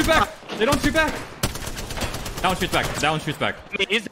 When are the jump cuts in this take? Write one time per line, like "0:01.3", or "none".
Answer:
none